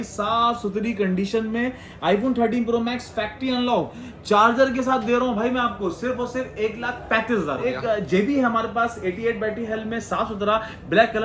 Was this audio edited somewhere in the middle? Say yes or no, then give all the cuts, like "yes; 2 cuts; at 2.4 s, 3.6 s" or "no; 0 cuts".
yes; 1 cut; at 7.8 s